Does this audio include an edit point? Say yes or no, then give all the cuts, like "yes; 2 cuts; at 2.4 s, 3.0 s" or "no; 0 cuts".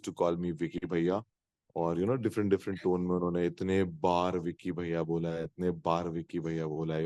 no; 0 cuts